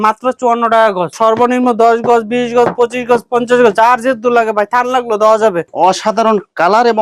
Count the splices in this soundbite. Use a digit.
2